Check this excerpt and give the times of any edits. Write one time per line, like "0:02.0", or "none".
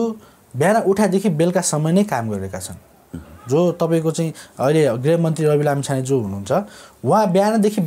none